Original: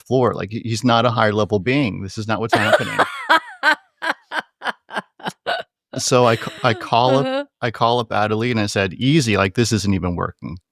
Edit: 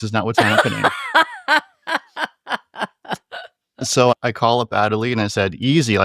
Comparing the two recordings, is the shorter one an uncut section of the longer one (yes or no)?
no